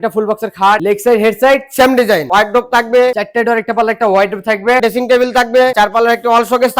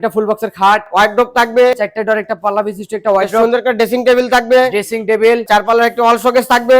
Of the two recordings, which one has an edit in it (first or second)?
first